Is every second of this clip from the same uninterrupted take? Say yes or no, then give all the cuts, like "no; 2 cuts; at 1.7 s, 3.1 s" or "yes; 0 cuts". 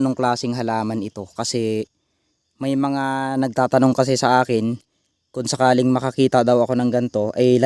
yes; 0 cuts